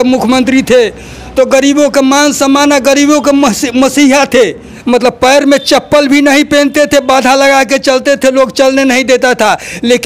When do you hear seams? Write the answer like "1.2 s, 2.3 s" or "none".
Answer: 4.7 s